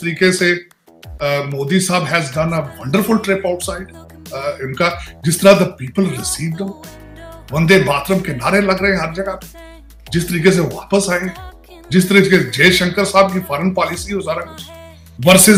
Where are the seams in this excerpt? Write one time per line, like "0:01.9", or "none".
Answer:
none